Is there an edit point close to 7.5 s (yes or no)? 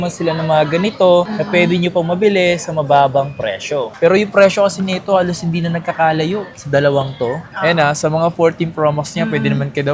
yes